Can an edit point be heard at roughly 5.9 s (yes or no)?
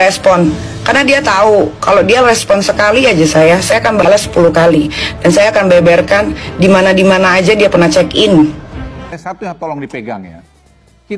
no